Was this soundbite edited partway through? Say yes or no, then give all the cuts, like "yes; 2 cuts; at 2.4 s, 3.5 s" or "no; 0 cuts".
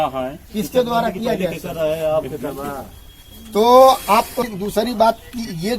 yes; 1 cut; at 4.4 s